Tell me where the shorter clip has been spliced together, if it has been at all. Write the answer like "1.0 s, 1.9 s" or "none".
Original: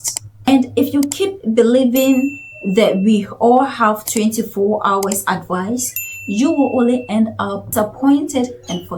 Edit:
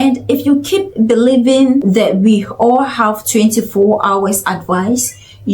1.8 s